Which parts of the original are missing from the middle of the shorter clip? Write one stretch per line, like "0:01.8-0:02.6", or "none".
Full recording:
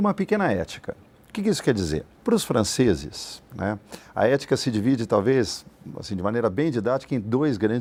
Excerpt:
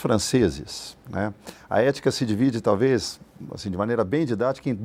none